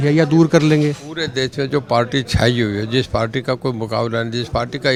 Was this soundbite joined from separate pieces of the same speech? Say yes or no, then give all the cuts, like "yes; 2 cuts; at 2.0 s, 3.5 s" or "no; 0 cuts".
no; 0 cuts